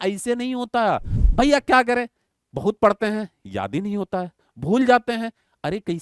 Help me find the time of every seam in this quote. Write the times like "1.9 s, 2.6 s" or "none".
1.2 s

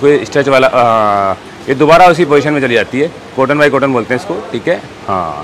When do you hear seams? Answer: none

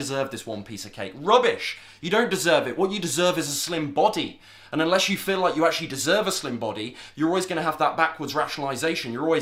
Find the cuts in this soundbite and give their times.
none

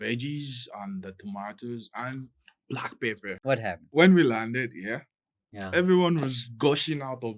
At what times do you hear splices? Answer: 3.6 s

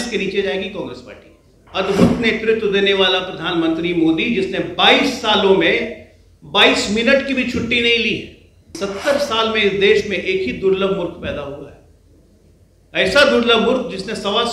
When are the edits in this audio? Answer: 1.6 s, 8.8 s

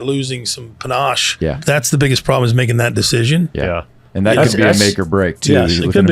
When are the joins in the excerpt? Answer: 1.6 s

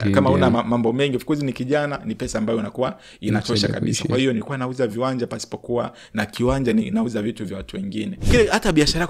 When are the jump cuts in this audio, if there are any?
8.2 s

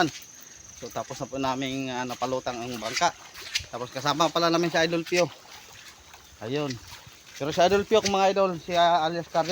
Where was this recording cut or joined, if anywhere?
none

